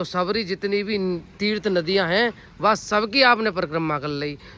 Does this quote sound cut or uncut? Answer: uncut